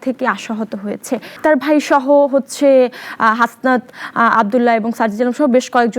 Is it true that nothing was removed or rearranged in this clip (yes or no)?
no